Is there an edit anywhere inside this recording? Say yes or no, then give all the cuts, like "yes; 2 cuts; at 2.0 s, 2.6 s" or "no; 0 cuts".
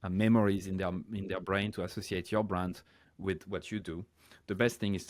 no; 0 cuts